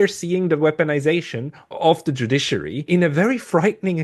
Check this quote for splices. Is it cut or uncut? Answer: cut